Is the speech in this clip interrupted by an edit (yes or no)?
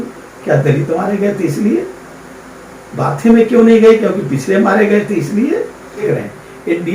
yes